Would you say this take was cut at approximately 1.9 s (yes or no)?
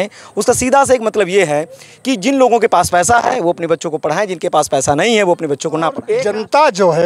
no